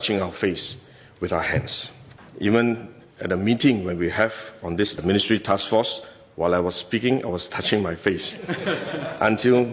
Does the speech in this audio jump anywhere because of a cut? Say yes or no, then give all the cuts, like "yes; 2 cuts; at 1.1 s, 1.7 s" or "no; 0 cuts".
yes; 1 cut; at 2.2 s